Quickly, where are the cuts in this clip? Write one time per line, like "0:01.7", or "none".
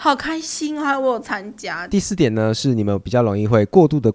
0:01.9